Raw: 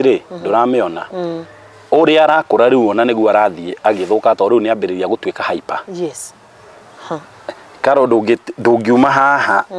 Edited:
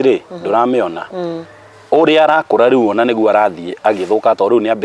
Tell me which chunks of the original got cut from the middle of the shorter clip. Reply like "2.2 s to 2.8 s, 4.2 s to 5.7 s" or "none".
none